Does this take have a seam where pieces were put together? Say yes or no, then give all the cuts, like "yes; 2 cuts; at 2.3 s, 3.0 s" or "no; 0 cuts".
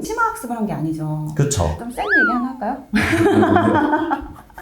yes; 1 cut; at 1.8 s